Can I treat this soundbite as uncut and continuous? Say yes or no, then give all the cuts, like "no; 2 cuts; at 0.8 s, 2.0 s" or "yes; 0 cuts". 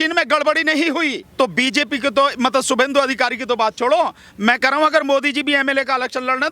no; 1 cut; at 1.2 s